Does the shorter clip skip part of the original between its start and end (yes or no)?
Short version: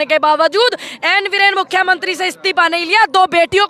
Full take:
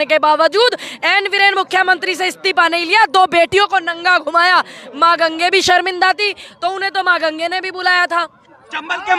no